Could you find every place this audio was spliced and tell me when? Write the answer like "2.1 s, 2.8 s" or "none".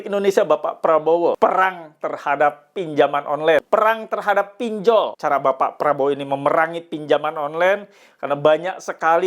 1.4 s, 3.6 s, 5.2 s